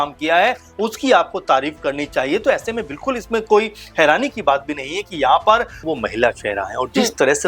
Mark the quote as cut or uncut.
cut